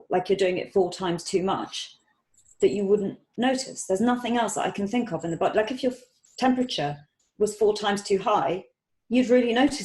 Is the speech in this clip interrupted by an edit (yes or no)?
no